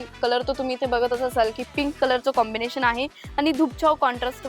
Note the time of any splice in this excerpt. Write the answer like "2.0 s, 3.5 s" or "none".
none